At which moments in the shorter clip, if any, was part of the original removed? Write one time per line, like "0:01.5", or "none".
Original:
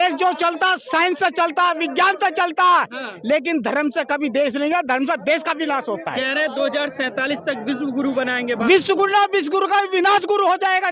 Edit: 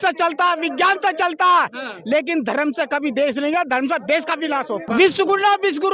0:04.9